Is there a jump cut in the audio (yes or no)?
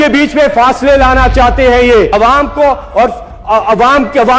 yes